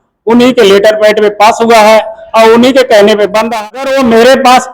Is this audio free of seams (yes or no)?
no